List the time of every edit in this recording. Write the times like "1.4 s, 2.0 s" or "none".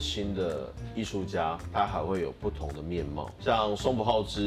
3.3 s